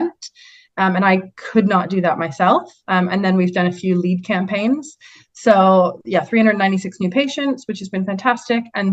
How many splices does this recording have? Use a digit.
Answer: 0